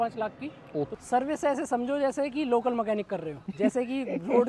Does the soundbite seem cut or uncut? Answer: cut